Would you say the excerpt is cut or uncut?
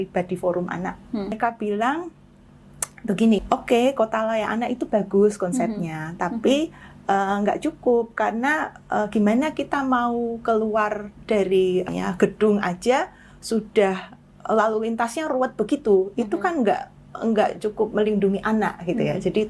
cut